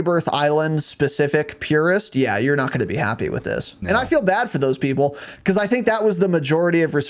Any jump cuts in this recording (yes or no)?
no